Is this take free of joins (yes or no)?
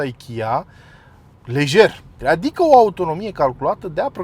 no